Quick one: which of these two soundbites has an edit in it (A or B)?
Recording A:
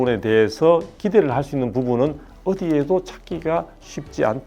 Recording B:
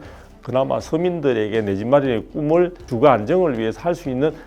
B